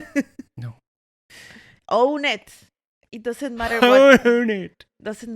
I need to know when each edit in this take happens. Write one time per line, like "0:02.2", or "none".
0:01.7